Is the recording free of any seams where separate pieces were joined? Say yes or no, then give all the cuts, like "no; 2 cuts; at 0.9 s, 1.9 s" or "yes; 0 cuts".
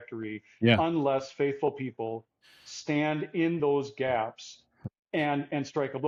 yes; 0 cuts